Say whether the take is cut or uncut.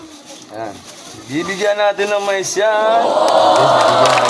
cut